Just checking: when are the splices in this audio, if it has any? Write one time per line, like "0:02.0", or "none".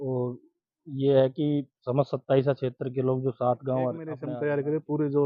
0:04.2

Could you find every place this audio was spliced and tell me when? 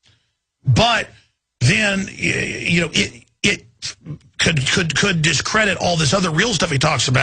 0:00.9

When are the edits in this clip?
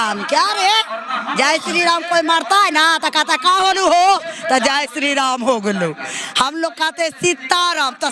none

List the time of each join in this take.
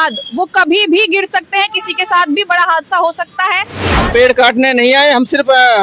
0:03.8

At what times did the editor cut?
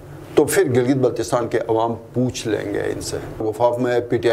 0:03.4

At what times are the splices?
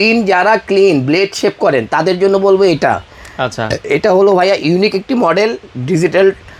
none

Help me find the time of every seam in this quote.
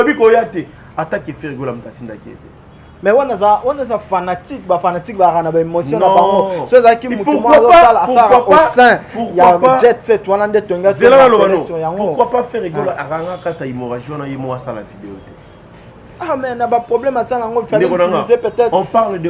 none

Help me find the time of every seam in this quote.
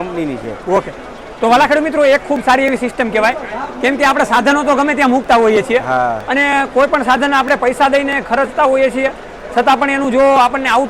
none

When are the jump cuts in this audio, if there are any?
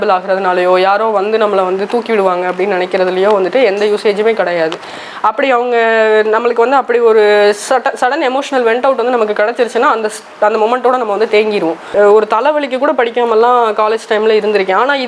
0:11.9

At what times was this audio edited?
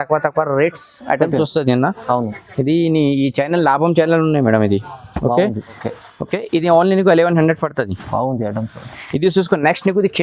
none

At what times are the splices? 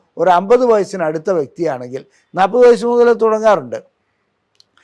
none

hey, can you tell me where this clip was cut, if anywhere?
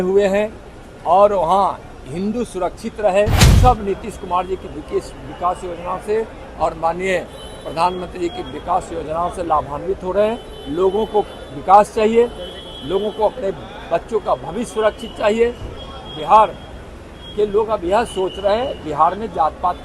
0:03.4

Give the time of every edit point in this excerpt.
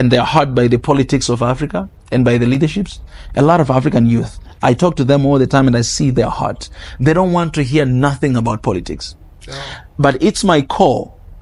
none

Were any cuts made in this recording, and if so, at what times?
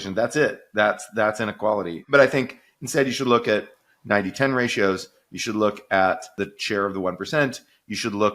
0:06.5

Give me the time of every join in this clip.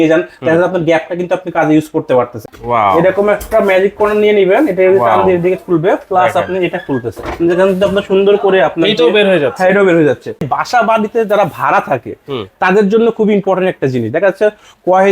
0:02.6
0:10.4

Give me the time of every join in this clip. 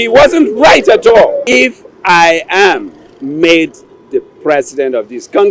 0:01.6

